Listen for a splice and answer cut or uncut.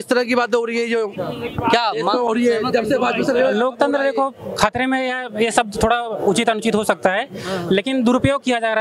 uncut